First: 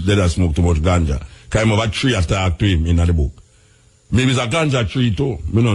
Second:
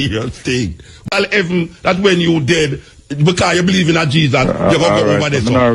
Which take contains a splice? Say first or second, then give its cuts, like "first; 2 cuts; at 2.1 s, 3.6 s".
second; 1 cut; at 1.1 s